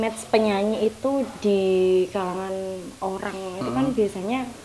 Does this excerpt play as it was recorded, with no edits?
yes; 0 cuts

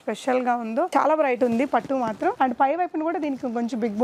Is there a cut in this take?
no; 0 cuts

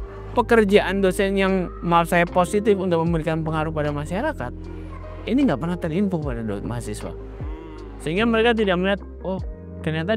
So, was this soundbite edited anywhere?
no; 0 cuts

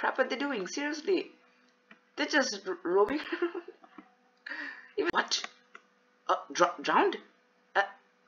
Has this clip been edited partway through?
yes; 1 cut; at 5.1 s

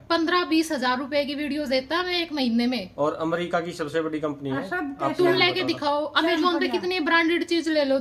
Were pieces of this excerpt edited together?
no; 0 cuts

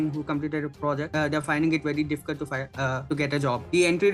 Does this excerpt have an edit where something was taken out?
yes; 2 cuts; at 1.1 s, 3.3 s

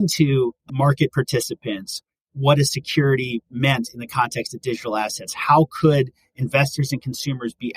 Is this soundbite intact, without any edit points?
yes; 0 cuts

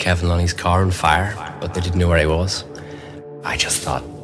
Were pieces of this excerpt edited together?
yes; 2 cuts; at 1.5 s, 3.3 s

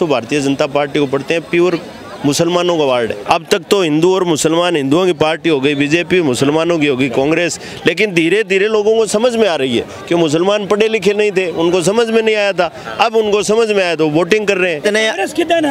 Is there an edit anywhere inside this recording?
yes; 2 cuts; at 3.2 s, 14.8 s

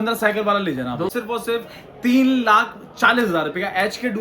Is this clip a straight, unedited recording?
no; 1 cut; at 1.1 s

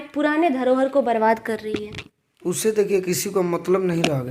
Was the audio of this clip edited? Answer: no; 0 cuts

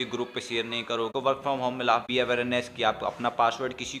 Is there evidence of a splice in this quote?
yes; 2 cuts; at 1.1 s, 2.1 s

